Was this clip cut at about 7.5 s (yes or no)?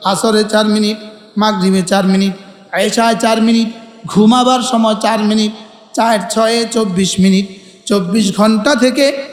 no